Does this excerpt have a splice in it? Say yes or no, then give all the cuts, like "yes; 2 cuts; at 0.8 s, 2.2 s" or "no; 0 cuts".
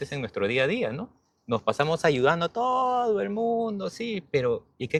no; 0 cuts